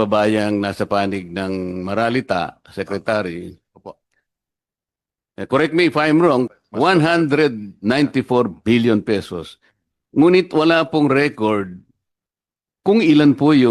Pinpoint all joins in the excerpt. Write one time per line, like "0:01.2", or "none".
0:06.5